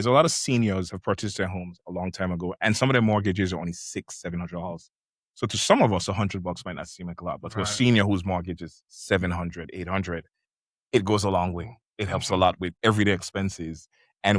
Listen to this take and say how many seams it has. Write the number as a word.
one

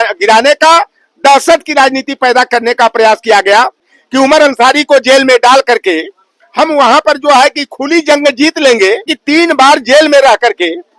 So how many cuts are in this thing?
two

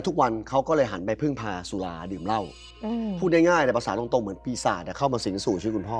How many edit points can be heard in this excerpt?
one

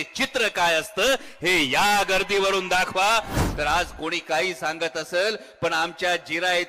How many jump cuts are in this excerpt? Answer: one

